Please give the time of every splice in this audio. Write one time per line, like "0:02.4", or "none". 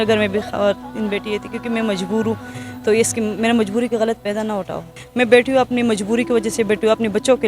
0:05.0